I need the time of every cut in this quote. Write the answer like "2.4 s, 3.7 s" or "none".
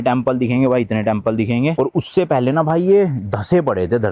1.7 s